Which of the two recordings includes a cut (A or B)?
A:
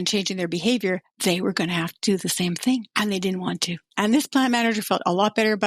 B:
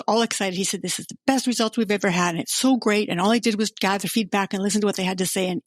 A